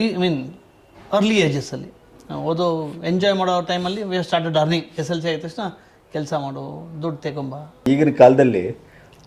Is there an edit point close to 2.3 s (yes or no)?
no